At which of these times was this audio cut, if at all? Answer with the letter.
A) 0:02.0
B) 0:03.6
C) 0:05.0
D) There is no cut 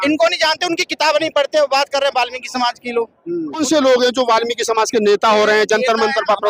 B